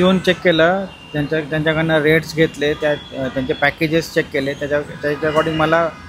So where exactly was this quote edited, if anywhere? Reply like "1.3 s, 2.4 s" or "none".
none